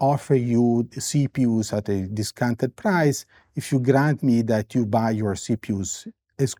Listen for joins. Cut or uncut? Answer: uncut